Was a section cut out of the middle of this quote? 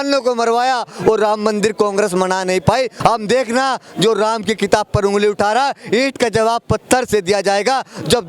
yes; 1 cut; at 2.9 s

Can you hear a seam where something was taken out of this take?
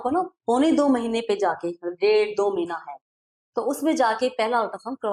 no; 0 cuts

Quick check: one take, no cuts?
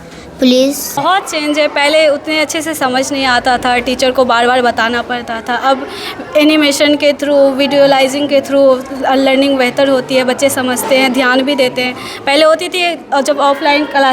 no; 1 cut; at 1.0 s

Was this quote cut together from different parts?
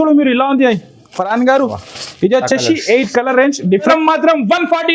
yes; 1 cut; at 3.9 s

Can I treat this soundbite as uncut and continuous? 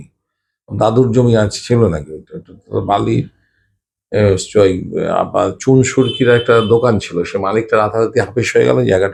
yes; 0 cuts

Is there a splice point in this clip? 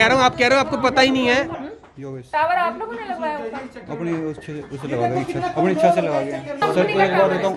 yes; 2 cuts; at 1.5 s, 6.6 s

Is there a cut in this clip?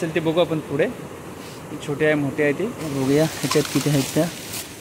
yes; 1 cut; at 2.8 s

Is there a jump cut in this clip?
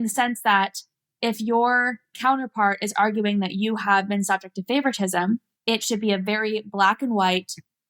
yes; 2 cuts; at 2.2 s, 5.5 s

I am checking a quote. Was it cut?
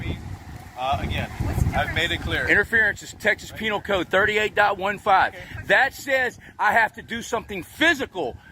no; 0 cuts

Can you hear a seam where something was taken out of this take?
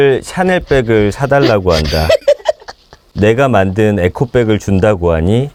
no; 0 cuts

